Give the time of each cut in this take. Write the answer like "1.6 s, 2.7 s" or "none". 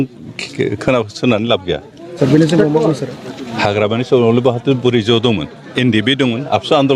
2.2 s